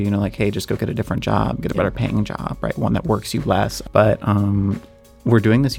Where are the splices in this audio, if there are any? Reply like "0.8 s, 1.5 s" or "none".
3.8 s